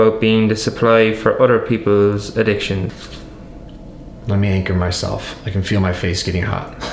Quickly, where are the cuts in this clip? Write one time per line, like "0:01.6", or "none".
0:03.0

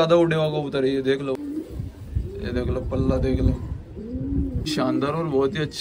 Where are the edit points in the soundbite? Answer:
0:01.4
0:04.7

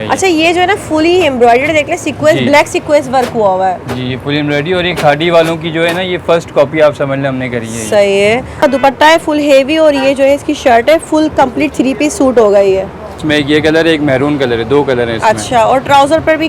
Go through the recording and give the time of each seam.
0:08.6
0:13.2

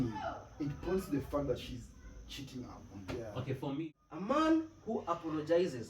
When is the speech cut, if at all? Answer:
0:03.8

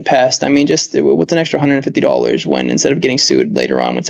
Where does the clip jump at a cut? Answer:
none

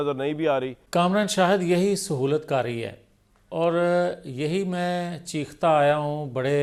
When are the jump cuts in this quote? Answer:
none

